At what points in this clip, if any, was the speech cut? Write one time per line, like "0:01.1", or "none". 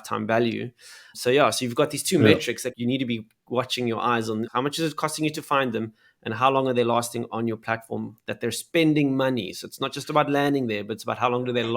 0:01.1
0:02.7
0:04.5